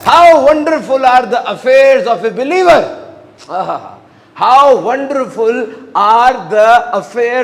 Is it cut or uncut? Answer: uncut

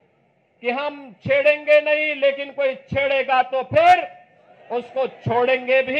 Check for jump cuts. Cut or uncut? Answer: uncut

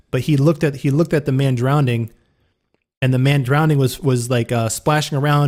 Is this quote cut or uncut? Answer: uncut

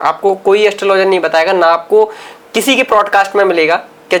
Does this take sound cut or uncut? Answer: uncut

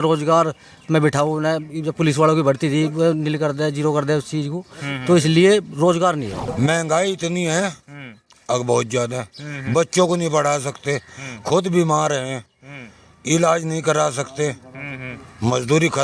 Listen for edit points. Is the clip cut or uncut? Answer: cut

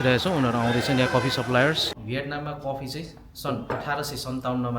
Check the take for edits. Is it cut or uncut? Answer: cut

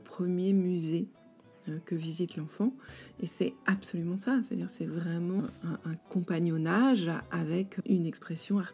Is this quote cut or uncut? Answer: cut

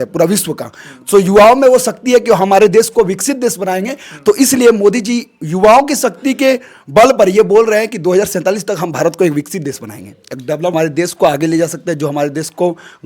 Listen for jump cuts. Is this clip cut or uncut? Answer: cut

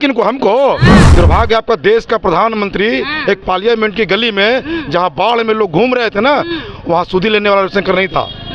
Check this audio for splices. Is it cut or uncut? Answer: cut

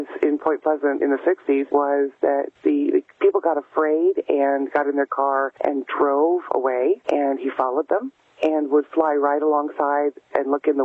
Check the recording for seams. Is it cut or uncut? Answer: cut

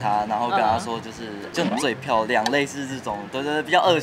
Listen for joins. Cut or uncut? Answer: uncut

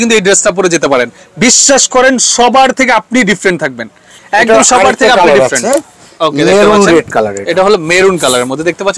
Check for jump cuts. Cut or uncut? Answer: uncut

